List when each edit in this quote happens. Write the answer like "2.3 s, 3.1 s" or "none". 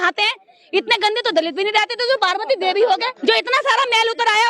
3.1 s